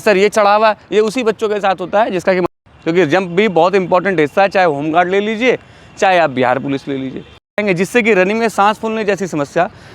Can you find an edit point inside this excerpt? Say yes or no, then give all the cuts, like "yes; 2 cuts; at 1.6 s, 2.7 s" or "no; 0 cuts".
yes; 2 cuts; at 2.5 s, 7.6 s